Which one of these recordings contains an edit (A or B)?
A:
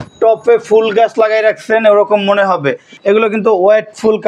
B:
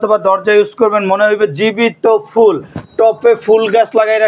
A